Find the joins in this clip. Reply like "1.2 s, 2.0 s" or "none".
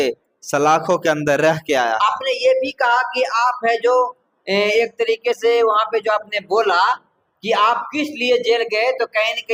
none